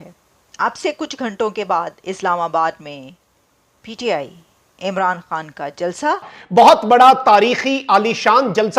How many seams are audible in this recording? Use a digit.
1